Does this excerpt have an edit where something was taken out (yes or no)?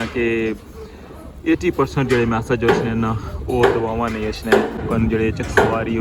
yes